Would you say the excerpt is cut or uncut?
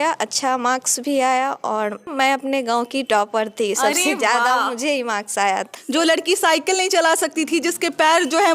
cut